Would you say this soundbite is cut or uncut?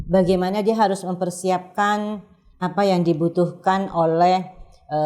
uncut